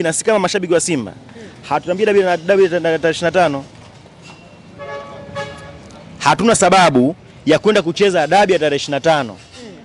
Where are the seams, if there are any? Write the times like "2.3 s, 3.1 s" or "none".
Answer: none